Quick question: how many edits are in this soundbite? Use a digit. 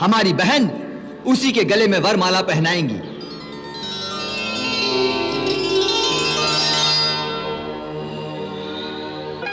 0